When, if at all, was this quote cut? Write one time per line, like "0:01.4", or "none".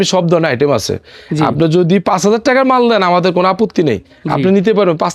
none